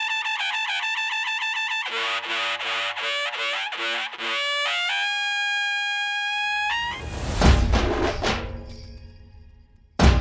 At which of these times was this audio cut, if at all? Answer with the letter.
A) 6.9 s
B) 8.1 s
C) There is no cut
C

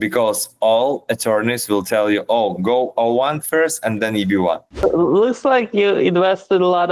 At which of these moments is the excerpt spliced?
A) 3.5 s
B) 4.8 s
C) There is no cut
B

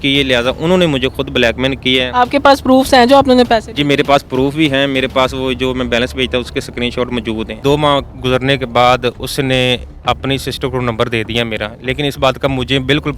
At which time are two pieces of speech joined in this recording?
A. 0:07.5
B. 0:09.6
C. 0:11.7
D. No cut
A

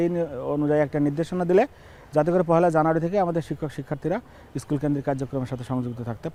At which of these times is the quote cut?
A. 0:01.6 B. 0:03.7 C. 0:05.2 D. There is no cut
D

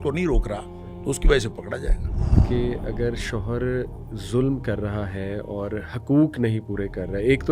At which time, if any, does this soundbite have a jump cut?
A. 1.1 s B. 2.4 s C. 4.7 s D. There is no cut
B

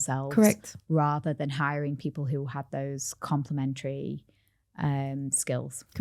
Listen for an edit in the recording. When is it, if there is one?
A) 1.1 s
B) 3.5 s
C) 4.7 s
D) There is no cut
D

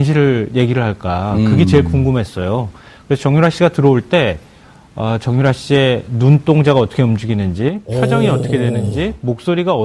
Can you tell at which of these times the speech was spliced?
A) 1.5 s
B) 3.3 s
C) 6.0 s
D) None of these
B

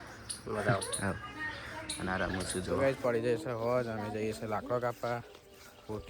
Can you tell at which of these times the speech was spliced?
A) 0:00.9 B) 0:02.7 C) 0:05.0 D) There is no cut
B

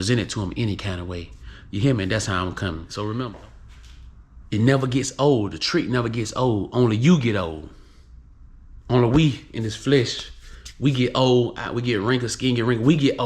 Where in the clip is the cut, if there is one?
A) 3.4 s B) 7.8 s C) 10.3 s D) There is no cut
A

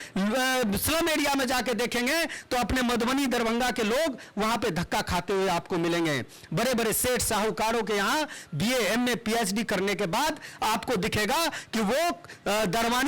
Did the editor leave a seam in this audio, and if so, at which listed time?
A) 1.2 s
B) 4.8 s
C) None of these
C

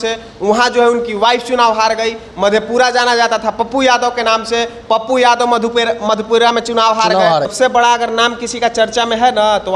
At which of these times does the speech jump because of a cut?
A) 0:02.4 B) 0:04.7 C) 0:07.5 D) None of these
C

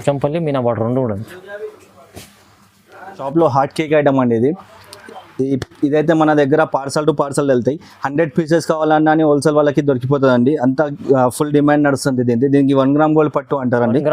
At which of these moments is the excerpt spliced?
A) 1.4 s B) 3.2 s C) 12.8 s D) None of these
B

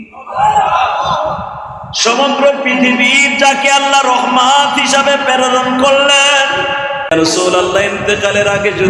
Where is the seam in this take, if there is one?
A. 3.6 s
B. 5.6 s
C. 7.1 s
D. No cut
C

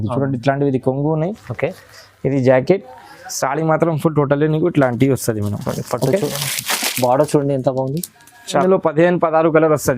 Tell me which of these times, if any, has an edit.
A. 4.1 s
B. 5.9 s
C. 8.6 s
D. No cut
C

